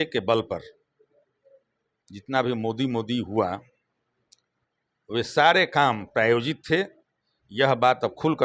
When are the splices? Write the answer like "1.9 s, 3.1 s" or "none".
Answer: none

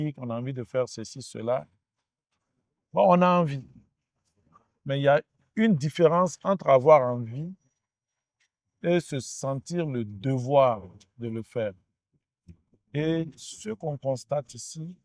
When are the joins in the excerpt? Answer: none

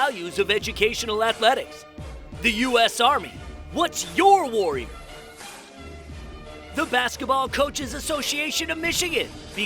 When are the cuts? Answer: 5.2 s, 6.7 s

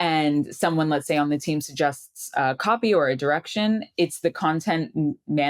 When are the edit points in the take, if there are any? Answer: none

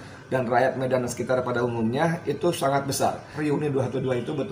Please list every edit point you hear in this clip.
3.3 s

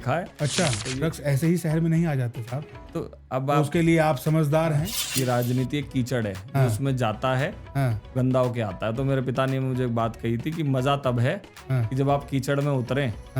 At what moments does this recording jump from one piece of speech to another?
1.2 s, 5.0 s

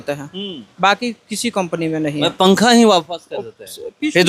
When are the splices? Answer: none

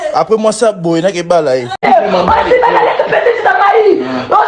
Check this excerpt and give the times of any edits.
1.7 s

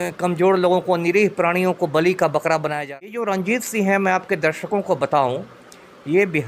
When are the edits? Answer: 2.8 s

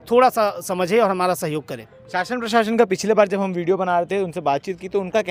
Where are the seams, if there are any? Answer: none

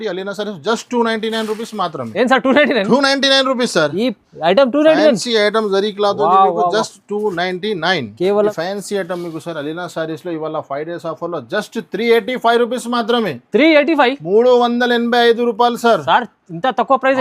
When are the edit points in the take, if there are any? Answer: 8.5 s

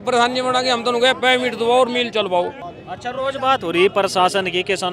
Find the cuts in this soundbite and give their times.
none

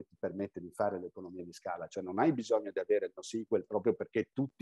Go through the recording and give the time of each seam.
none

